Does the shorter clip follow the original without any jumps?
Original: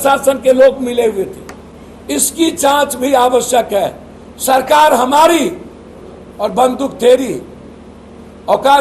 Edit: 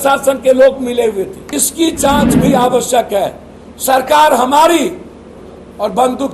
no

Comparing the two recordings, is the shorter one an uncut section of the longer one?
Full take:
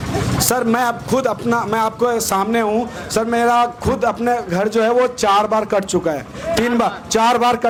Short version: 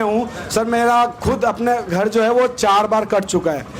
yes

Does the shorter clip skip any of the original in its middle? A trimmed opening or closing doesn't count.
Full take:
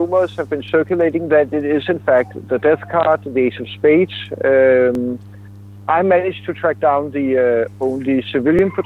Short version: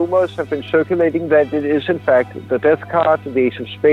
no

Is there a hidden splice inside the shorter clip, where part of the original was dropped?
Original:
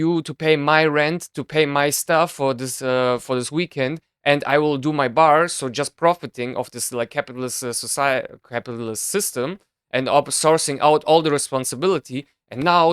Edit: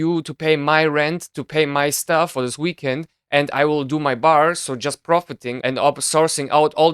yes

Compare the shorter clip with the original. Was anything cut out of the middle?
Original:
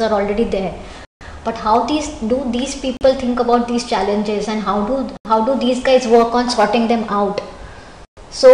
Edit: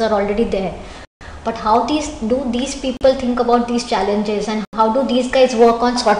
yes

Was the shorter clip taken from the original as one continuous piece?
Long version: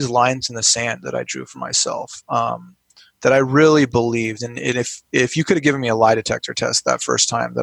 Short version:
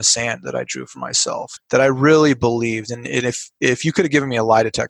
no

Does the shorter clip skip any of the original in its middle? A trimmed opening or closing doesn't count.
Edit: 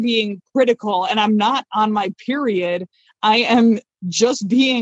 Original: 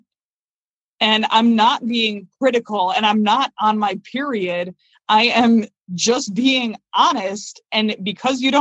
no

